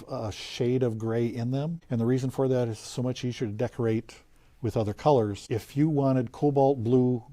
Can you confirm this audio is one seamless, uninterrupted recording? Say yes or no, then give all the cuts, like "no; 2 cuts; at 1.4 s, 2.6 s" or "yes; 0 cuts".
no; 2 cuts; at 1.8 s, 5.4 s